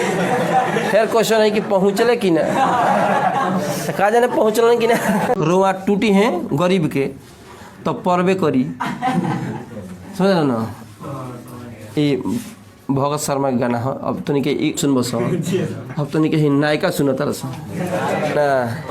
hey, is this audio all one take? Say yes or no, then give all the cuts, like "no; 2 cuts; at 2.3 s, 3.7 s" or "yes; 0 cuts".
no; 2 cuts; at 5.4 s, 14.8 s